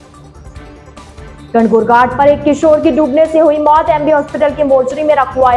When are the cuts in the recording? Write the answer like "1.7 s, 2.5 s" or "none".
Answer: 1.5 s